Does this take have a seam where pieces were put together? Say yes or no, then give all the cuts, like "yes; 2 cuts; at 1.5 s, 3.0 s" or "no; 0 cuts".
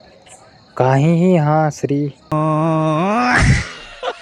no; 0 cuts